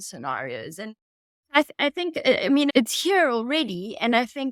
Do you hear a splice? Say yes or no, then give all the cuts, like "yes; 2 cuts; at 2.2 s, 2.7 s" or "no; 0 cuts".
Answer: no; 0 cuts